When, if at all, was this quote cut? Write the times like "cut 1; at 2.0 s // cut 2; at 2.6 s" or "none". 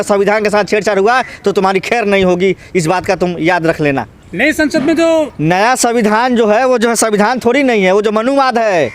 none